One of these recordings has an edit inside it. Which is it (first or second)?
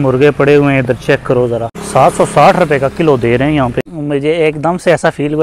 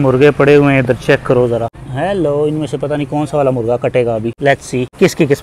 first